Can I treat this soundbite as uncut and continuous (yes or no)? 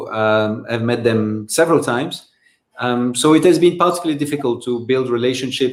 yes